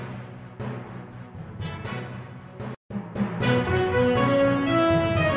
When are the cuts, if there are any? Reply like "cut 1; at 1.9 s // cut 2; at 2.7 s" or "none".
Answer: none